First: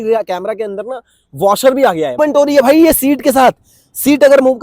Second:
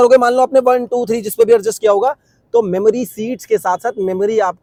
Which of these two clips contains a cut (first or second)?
first